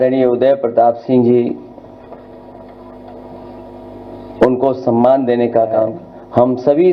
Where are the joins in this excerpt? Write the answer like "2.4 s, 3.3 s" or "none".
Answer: 5.9 s